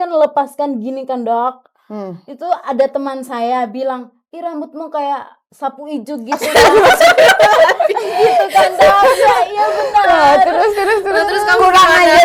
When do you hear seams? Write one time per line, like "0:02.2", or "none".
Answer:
none